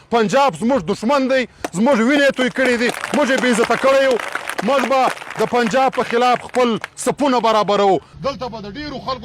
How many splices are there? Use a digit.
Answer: 1